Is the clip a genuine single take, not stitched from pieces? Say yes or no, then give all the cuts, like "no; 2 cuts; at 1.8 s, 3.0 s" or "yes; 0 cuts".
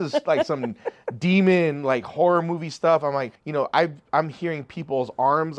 no; 1 cut; at 3.4 s